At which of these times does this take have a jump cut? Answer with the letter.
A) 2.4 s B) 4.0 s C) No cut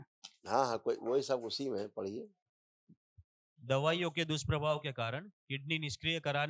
C